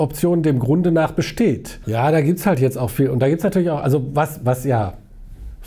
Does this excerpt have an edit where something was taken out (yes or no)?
yes